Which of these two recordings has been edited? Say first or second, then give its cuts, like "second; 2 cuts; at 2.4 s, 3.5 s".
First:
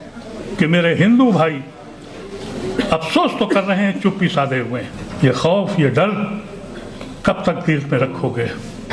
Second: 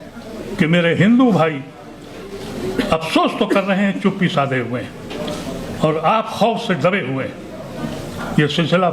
first; 1 cut; at 5.0 s